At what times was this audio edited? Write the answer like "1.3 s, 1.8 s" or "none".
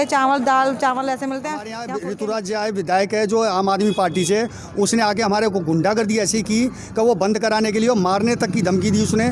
1.8 s